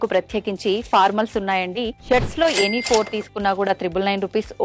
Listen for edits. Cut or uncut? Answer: cut